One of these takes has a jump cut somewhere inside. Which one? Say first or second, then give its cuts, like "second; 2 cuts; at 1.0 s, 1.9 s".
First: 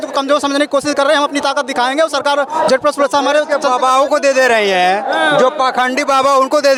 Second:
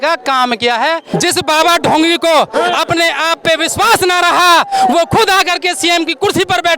second; 1 cut; at 1.1 s